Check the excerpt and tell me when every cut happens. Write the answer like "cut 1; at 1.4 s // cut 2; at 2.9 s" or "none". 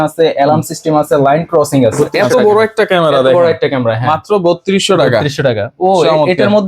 cut 1; at 2.1 s